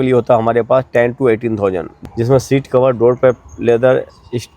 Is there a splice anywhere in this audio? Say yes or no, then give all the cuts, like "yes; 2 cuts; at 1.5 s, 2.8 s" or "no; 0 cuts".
yes; 1 cut; at 2.0 s